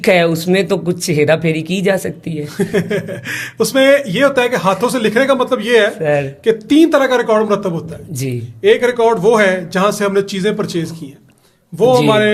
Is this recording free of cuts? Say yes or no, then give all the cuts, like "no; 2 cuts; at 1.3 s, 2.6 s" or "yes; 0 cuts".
yes; 0 cuts